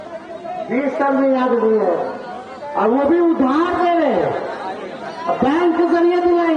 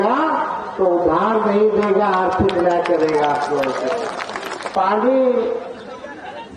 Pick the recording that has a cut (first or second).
second